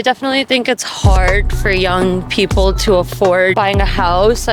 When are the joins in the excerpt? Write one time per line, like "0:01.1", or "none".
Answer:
0:03.5